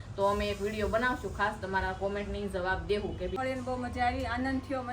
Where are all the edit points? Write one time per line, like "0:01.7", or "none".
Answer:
0:03.3